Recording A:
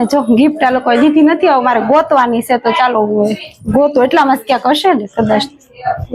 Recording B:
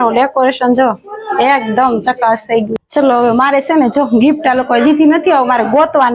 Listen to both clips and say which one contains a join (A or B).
B